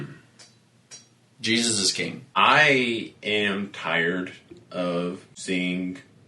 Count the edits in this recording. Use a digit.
2